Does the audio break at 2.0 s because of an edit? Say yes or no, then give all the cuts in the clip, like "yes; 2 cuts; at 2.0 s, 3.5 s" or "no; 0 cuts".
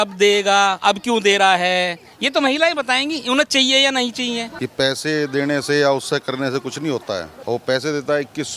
no; 2 cuts; at 4.5 s, 7.3 s